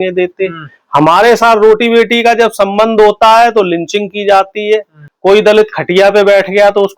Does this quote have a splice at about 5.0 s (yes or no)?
yes